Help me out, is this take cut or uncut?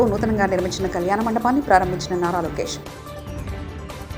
uncut